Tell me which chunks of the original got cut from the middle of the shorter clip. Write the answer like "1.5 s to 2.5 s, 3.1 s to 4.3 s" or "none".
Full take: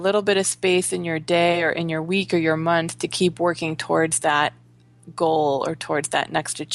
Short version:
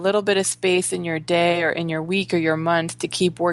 none